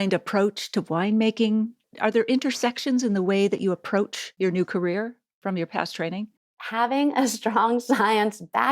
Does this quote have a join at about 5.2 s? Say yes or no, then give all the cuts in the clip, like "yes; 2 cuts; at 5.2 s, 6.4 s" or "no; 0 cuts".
yes; 3 cuts; at 4.2 s, 5.2 s, 6.6 s